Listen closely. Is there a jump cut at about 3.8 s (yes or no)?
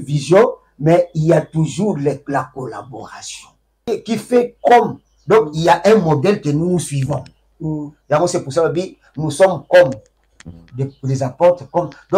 yes